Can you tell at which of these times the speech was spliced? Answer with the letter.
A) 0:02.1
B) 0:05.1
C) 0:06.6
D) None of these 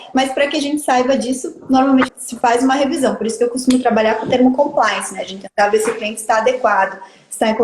A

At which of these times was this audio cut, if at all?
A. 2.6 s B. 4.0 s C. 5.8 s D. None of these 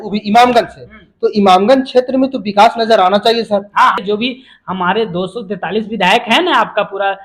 B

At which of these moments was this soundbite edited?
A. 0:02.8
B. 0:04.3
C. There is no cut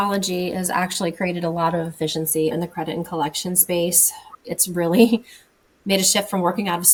C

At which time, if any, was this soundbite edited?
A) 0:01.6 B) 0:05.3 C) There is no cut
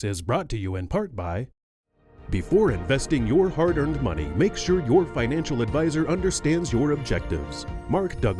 A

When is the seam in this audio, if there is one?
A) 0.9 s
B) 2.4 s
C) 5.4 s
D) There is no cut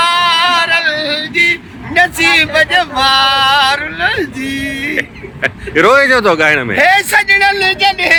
D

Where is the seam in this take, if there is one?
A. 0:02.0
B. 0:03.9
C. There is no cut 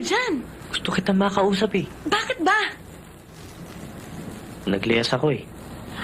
A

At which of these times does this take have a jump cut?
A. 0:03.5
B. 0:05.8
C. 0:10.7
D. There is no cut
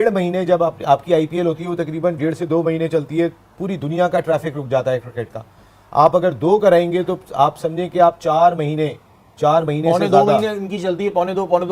D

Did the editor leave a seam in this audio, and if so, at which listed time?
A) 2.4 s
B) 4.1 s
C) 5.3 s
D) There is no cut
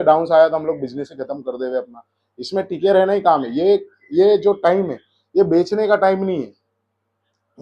D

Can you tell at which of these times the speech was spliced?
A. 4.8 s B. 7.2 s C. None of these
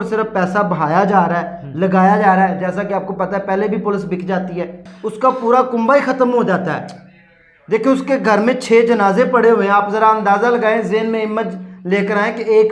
A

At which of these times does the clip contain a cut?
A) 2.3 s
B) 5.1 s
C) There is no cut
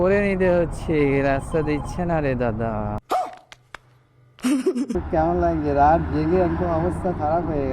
B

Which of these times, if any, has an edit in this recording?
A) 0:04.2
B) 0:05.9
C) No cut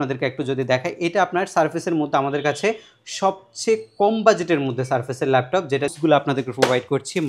B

